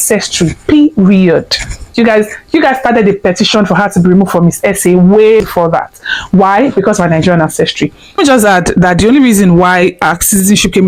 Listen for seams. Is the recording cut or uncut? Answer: uncut